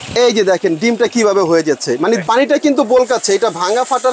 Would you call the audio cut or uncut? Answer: cut